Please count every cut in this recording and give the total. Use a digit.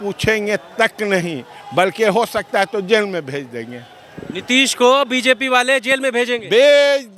0